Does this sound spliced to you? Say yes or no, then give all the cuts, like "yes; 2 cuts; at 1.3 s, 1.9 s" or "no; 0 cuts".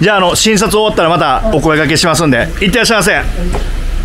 no; 0 cuts